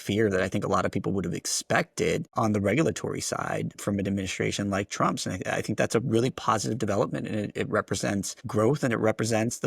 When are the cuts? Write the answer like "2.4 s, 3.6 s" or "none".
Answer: 2.3 s, 3.7 s, 8.4 s